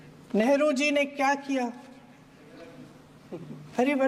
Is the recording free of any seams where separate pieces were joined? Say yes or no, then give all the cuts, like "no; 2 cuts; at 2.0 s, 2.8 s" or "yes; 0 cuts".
yes; 0 cuts